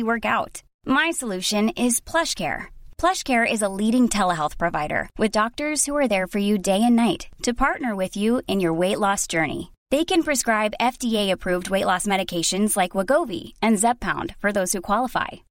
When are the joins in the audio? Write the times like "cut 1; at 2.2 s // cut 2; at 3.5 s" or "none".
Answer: none